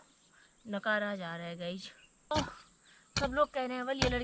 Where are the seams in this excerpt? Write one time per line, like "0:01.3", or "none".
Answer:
0:02.3